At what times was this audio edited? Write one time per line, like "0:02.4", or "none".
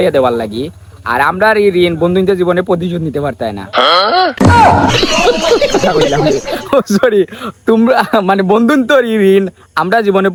none